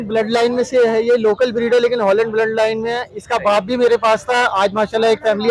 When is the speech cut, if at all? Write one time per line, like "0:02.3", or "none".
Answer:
none